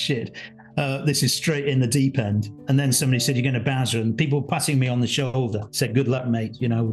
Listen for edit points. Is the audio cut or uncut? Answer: uncut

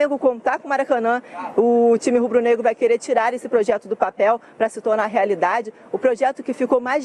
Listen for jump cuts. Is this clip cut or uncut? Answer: cut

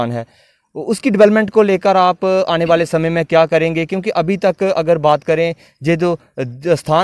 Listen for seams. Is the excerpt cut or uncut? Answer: uncut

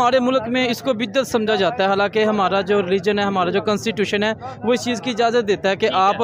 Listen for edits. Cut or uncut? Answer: uncut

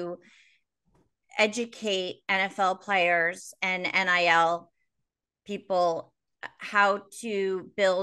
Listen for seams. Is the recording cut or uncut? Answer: uncut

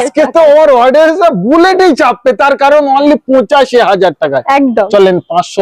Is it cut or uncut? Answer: uncut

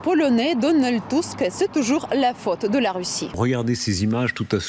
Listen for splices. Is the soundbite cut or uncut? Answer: cut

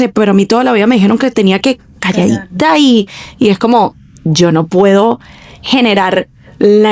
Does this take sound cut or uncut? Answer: uncut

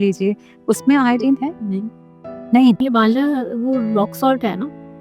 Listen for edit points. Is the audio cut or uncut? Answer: uncut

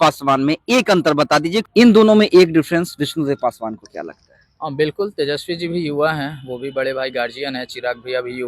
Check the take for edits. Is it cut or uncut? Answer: cut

